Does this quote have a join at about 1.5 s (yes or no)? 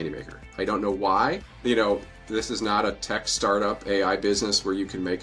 yes